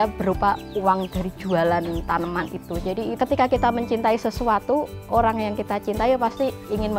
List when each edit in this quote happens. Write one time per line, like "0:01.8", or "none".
0:03.1